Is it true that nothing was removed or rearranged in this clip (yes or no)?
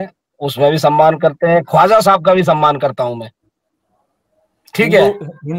yes